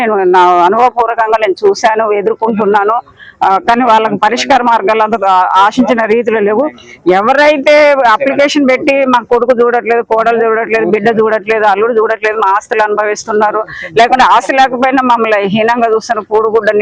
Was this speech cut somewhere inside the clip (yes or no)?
no